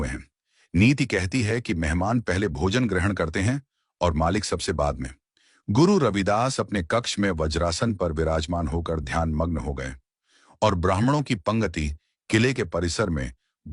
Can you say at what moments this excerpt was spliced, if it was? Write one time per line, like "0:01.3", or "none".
0:06.2